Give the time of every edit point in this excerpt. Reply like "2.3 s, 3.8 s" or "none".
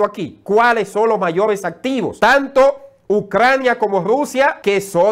none